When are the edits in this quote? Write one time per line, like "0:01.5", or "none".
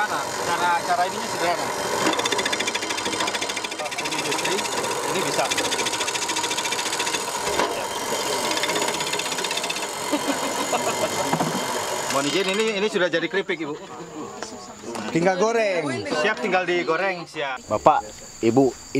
0:03.8
0:17.6